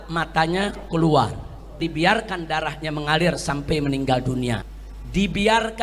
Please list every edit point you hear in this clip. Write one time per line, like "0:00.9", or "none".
0:01.8
0:04.7